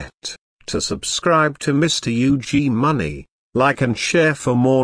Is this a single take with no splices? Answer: yes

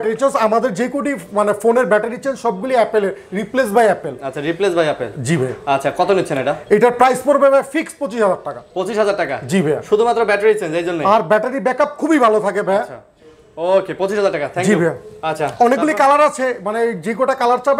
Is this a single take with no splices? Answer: yes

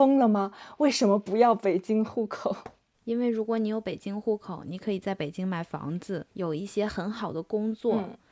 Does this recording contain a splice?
yes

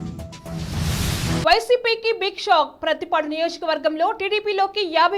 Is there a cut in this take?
yes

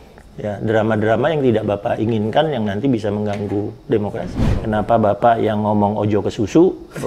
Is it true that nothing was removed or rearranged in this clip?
no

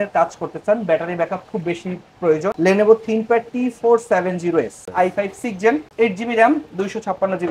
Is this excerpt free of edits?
no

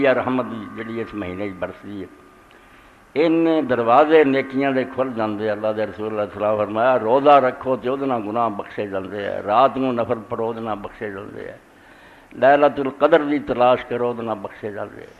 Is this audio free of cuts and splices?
yes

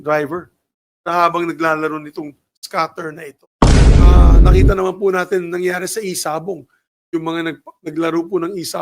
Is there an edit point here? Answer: yes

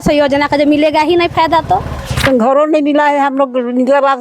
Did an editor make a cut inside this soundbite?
yes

